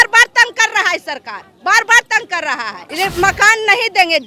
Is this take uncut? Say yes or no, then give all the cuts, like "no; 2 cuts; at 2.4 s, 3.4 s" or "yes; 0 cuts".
no; 1 cut; at 2.8 s